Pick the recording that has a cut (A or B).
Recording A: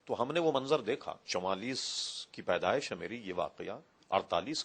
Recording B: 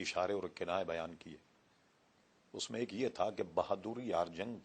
A